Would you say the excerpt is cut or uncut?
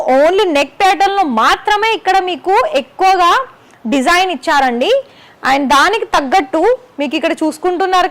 uncut